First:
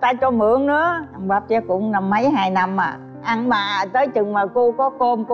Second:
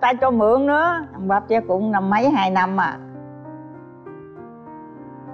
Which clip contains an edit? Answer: first; 1 cut; at 3.1 s

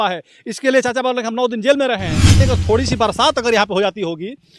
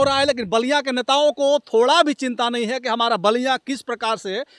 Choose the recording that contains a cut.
first; 1 cut; at 2.4 s

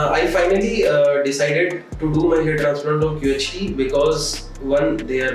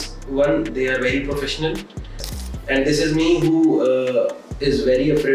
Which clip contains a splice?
second; 1 cut; at 2.2 s

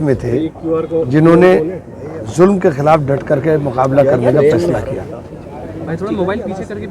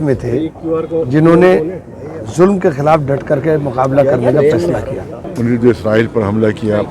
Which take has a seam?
second; 1 cut; at 5.2 s

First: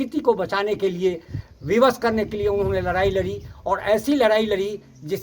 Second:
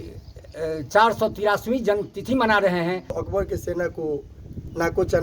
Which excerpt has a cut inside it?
second; 1 cut; at 3.2 s

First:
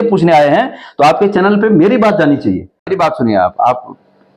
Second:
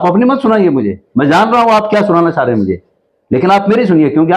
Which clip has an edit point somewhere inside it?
first; 1 cut; at 2.9 s

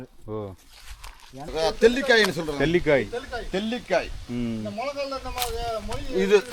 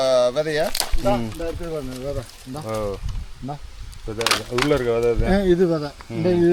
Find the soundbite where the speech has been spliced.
first; 1 cut; at 1.5 s

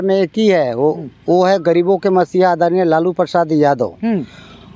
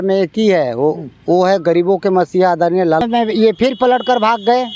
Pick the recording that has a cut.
second; 1 cut; at 3.0 s

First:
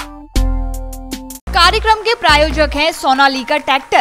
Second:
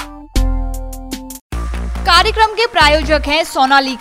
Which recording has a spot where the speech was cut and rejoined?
first; 1 cut; at 1.4 s

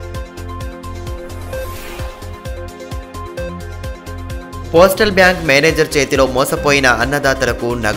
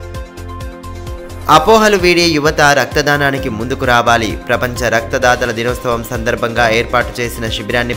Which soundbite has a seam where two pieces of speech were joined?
second; 1 cut; at 0.9 s

